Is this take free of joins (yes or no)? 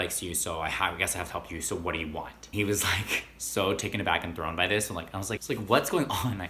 yes